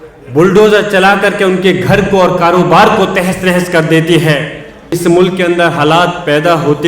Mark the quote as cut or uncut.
cut